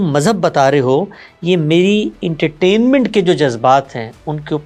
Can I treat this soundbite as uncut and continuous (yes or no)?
yes